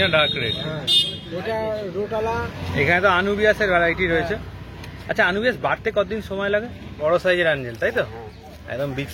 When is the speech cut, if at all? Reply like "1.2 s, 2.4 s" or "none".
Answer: 2.6 s, 6.9 s